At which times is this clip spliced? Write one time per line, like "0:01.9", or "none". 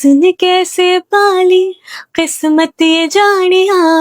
none